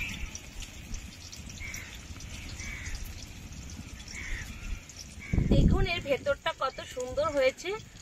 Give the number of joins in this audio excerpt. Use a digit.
0